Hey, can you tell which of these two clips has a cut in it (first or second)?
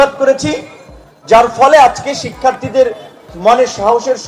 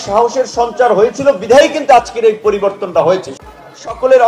second